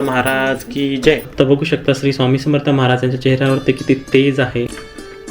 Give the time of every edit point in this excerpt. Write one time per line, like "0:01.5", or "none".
0:01.3